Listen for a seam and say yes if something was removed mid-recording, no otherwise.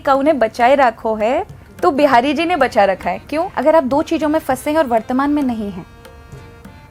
yes